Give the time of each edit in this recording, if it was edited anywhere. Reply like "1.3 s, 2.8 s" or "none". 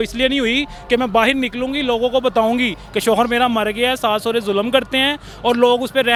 none